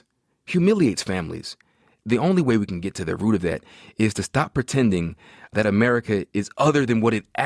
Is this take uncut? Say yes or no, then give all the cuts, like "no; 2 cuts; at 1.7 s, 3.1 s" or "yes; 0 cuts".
no; 2 cuts; at 1.9 s, 5.5 s